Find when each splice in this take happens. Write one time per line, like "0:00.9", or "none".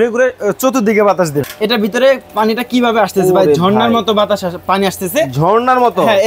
0:01.4